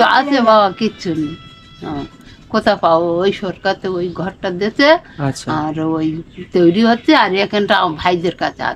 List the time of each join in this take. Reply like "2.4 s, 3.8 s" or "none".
none